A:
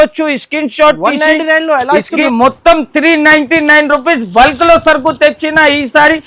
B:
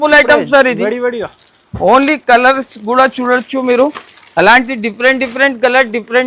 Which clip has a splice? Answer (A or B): A